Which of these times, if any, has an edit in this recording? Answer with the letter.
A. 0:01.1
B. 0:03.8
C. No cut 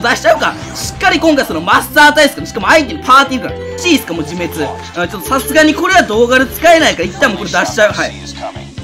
B